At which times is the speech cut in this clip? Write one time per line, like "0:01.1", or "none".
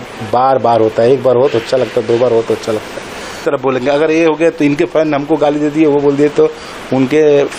0:03.4